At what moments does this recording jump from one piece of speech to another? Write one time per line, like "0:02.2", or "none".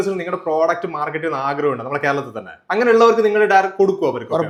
none

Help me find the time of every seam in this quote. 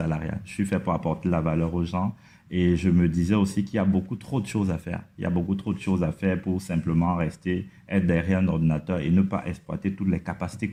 none

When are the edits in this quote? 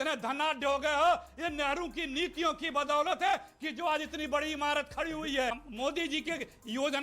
0:05.5

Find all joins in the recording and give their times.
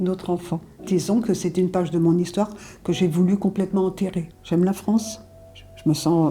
0:04.3

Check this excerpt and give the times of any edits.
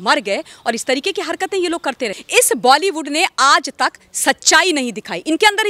0:02.2

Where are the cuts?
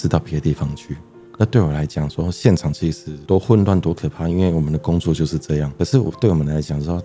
none

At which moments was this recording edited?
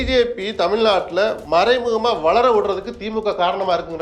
0:01.4

